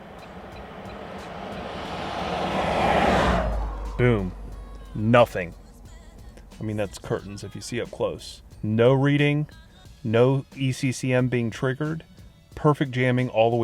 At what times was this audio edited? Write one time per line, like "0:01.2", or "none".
0:08.5